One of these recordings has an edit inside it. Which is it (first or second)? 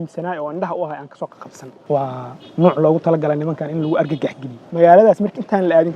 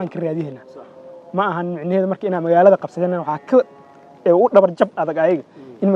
first